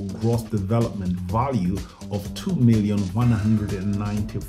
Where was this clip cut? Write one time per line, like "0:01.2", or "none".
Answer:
none